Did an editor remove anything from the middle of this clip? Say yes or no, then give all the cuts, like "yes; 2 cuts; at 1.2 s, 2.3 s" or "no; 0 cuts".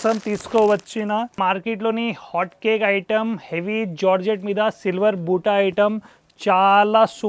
yes; 1 cut; at 1.4 s